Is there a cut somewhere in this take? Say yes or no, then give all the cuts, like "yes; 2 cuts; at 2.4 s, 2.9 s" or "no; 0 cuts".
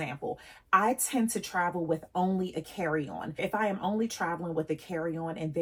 no; 0 cuts